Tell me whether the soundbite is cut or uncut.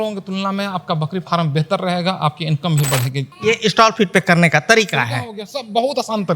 cut